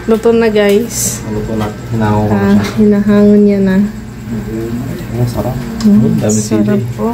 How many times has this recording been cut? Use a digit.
0